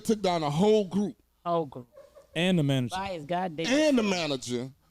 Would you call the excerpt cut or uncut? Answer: uncut